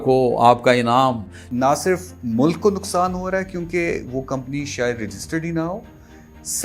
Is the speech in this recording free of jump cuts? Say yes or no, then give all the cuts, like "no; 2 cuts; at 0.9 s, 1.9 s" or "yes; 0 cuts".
no; 1 cut; at 1.4 s